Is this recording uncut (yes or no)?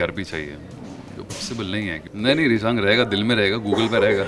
no